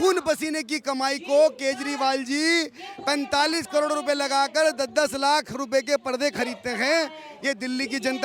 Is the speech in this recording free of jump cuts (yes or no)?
yes